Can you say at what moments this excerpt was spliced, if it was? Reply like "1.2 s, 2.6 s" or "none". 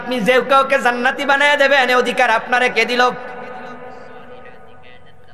none